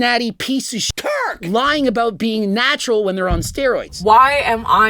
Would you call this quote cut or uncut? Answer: cut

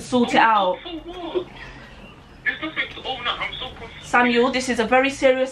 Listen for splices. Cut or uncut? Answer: uncut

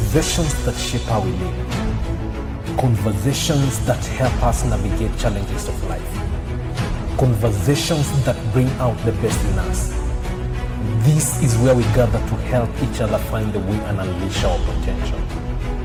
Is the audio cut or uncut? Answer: uncut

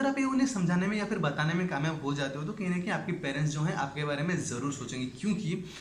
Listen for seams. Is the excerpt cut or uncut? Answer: uncut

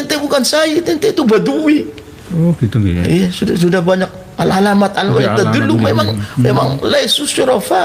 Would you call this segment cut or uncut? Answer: uncut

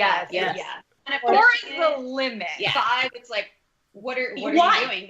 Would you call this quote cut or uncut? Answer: cut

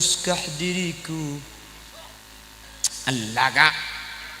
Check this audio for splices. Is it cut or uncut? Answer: cut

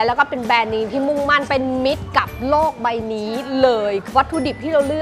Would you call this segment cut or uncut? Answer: uncut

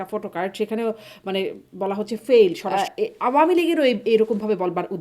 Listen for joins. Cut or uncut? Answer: cut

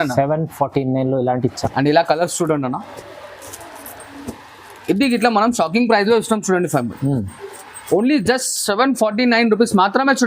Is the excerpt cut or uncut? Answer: cut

